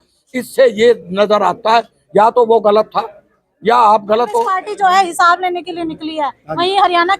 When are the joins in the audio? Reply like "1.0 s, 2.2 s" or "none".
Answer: 4.6 s

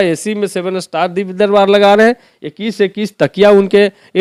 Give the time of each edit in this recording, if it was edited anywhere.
none

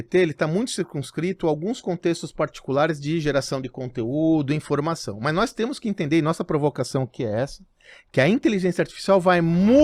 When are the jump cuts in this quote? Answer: none

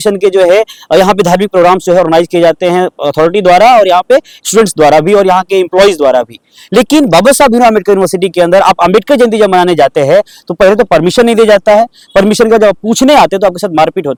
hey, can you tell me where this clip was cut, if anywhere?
none

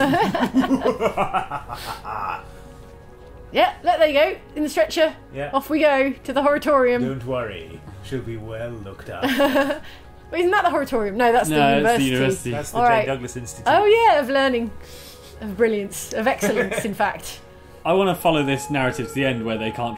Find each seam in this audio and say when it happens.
none

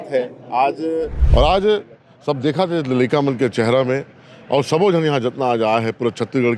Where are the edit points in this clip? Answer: 1.2 s

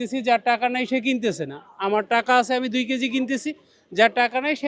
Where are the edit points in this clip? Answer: none

